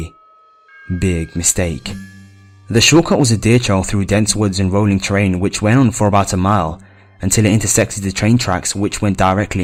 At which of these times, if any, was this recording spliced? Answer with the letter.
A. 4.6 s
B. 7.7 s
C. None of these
C